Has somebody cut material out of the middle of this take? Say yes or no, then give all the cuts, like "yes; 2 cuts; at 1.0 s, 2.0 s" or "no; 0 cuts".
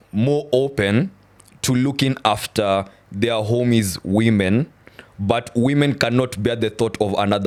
no; 0 cuts